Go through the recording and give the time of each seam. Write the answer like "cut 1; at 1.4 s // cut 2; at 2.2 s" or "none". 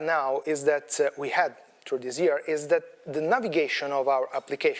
none

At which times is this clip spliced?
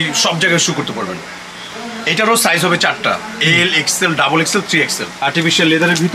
cut 1; at 5.0 s

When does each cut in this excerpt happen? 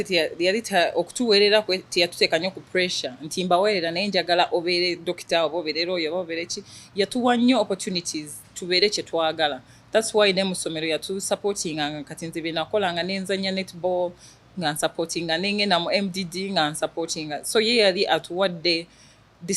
none

